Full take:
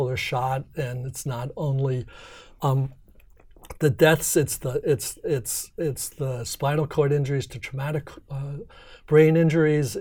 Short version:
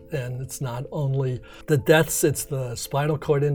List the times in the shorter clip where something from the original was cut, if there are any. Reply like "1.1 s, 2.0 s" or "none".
1.5 s, 2.4 s